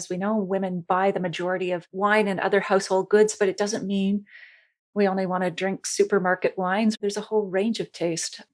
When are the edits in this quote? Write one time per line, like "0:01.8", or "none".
0:01.9
0:06.9